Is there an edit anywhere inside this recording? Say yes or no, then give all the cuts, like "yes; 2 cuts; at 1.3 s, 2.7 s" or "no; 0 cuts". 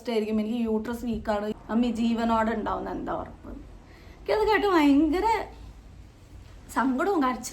yes; 1 cut; at 1.5 s